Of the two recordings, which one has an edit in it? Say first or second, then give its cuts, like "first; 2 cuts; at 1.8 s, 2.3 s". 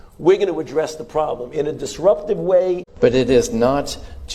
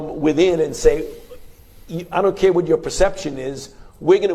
first; 1 cut; at 2.9 s